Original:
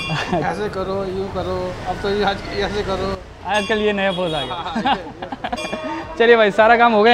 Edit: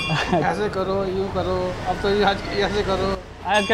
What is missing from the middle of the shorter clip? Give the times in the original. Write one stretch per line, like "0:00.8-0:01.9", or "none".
none